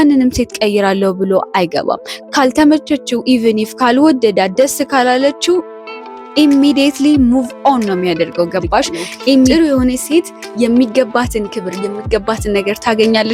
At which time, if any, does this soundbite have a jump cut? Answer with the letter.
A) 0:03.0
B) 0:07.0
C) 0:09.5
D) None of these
C